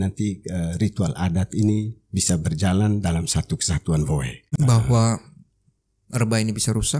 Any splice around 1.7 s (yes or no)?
no